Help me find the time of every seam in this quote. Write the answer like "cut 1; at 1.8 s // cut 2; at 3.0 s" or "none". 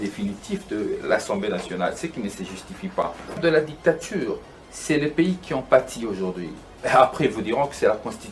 cut 1; at 3.4 s